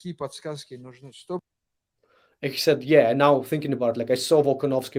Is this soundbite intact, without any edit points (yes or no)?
yes